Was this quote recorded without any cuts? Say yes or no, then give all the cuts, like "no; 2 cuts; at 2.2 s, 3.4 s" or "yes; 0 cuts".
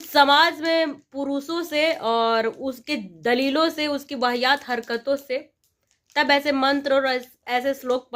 yes; 0 cuts